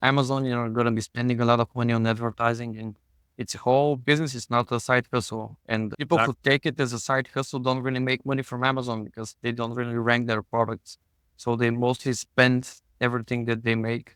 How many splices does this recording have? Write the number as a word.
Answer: zero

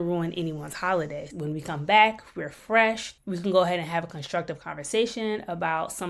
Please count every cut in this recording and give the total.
one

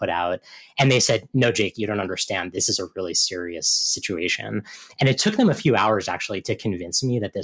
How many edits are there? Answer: one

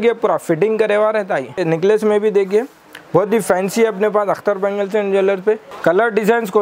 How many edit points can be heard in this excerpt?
two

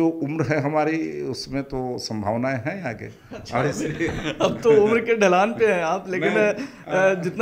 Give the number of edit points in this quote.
zero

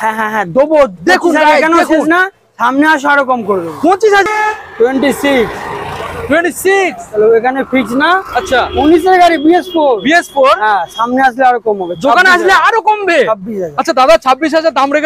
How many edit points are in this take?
one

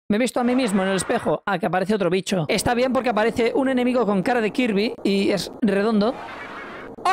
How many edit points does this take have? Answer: one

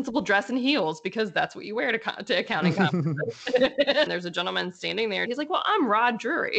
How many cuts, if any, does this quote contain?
two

